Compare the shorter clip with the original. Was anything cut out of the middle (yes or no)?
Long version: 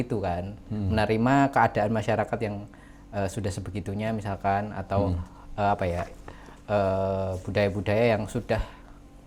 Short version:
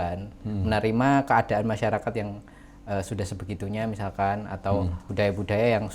yes